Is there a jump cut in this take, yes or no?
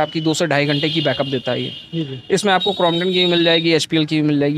no